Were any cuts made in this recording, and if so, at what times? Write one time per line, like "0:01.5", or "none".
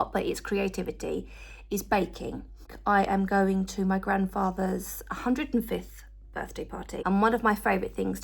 0:02.7
0:07.0